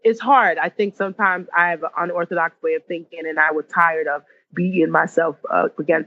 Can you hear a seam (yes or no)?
no